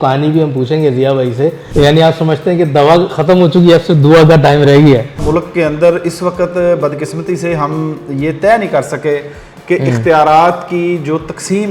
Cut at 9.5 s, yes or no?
no